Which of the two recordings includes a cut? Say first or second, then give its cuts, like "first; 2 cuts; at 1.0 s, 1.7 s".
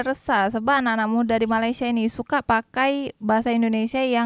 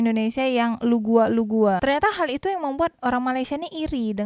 second; 1 cut; at 1.8 s